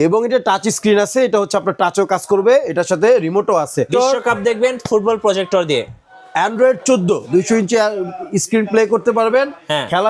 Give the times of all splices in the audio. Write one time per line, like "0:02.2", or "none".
0:03.9
0:07.2